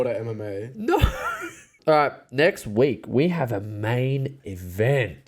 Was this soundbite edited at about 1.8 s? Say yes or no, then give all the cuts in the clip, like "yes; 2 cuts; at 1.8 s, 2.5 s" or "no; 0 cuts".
yes; 1 cut; at 1.8 s